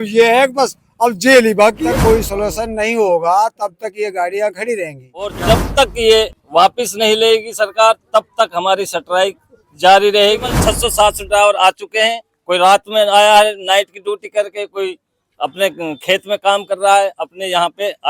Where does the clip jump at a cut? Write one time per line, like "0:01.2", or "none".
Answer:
0:01.8
0:05.4
0:10.5